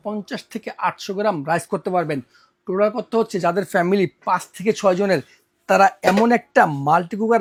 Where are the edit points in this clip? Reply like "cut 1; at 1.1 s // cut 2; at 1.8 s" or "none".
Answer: none

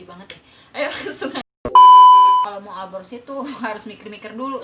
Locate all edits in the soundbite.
cut 1; at 1.1 s // cut 2; at 2.5 s

